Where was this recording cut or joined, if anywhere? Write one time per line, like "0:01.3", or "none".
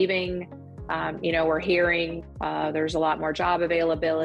0:02.2